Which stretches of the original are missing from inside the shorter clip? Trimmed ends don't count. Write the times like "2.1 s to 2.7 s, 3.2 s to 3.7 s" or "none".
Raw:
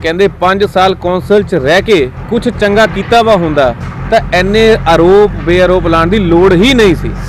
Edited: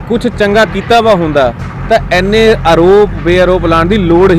none